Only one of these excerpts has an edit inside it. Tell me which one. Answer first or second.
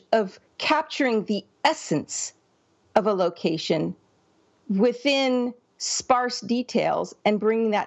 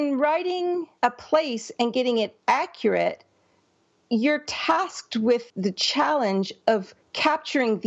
second